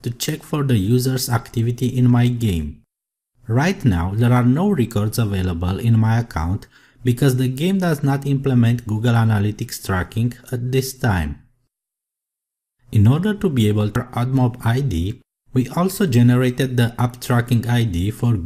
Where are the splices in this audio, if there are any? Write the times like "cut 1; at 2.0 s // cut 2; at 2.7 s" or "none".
none